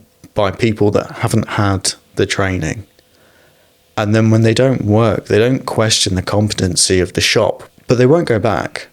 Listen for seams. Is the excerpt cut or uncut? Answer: cut